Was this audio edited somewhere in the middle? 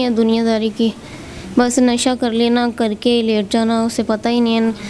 no; 0 cuts

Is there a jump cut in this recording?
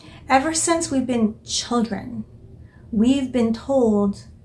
no; 0 cuts

